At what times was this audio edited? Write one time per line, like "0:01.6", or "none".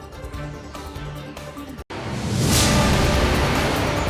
0:01.8